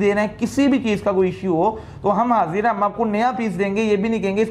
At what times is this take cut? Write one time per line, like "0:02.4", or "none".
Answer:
none